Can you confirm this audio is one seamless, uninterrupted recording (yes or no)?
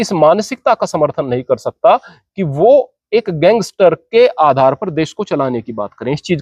yes